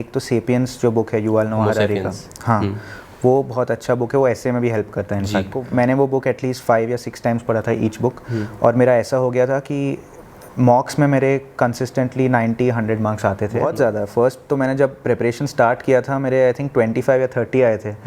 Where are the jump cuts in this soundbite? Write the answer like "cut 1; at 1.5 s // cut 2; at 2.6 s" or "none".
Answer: cut 1; at 5.6 s // cut 2; at 13.6 s